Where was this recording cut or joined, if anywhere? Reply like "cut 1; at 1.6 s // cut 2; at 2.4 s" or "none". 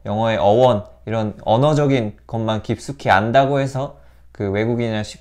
none

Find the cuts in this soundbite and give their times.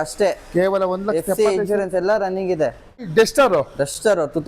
cut 1; at 3.0 s

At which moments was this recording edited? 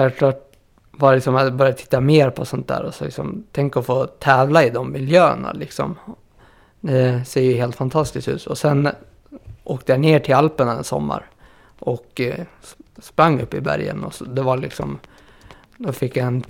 none

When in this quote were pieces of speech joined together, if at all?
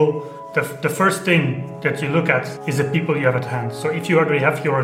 cut 1; at 2.6 s

